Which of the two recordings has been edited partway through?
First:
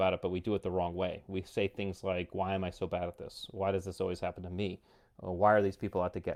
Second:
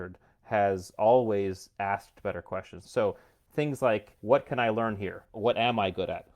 second; 3 cuts; at 2.8 s, 4.1 s, 5.3 s

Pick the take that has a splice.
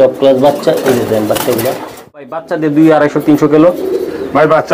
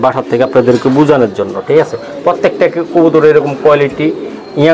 first; 1 cut; at 2.4 s

